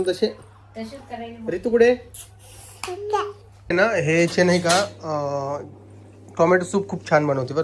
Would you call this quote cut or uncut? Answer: cut